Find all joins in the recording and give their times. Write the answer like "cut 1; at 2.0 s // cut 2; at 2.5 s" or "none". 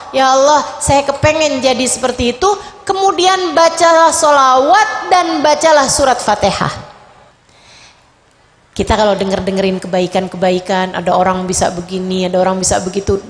cut 1; at 7.3 s

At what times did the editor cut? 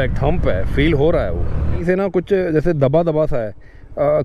cut 1; at 1.8 s

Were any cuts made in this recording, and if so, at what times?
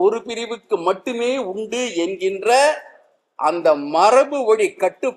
none

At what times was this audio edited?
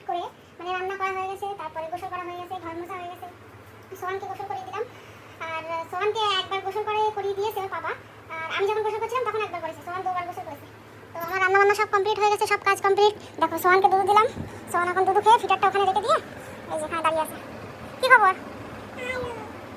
none

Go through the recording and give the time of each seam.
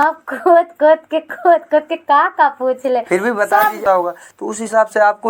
cut 1; at 3.8 s

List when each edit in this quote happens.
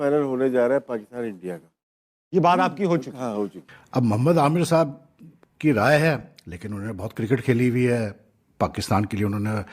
cut 1; at 3.6 s

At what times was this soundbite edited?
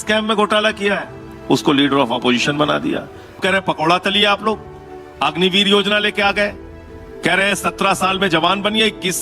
cut 1; at 3.4 s // cut 2; at 6.9 s

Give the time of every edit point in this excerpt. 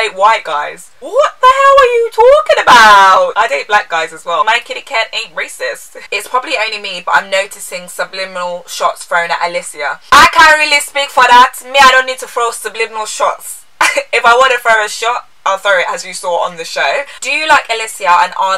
cut 1; at 3.3 s // cut 2; at 4.4 s // cut 3; at 6.0 s // cut 4; at 17.1 s

